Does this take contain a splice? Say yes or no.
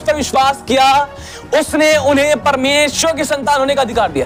no